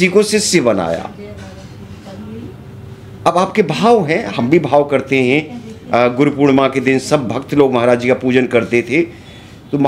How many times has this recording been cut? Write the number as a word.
zero